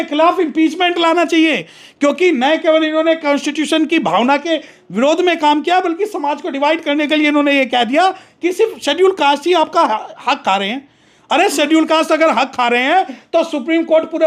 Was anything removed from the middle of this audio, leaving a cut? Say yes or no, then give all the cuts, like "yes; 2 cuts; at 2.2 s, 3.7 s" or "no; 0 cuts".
no; 0 cuts